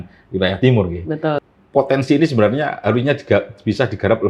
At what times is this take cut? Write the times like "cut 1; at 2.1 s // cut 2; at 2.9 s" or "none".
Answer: cut 1; at 1.4 s